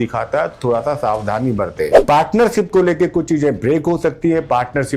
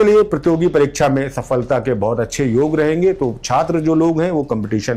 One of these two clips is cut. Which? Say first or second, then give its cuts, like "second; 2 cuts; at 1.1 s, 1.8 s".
first; 1 cut; at 2.0 s